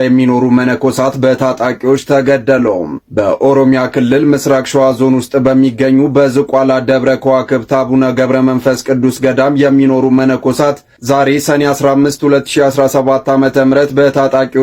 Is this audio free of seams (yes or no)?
yes